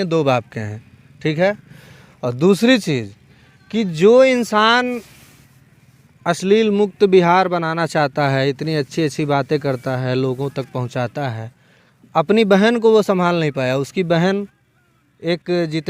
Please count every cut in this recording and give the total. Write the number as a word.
zero